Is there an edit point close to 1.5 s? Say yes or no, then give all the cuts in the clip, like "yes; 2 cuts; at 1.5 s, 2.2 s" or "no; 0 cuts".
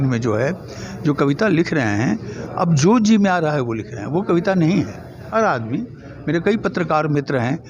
no; 1 cut; at 5.3 s